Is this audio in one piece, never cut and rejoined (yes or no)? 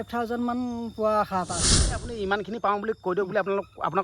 no